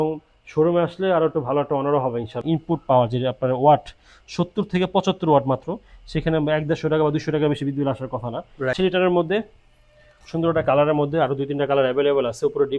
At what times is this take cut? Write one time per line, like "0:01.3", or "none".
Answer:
0:02.4
0:08.7